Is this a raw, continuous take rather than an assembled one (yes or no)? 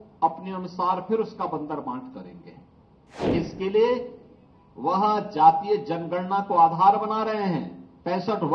no